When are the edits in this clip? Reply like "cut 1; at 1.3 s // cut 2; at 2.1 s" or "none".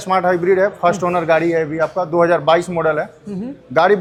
none